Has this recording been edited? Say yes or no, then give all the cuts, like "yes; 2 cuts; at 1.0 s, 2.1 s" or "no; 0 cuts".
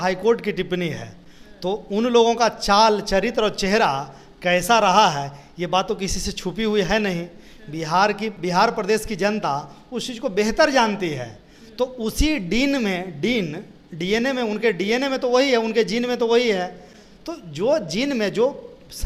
no; 0 cuts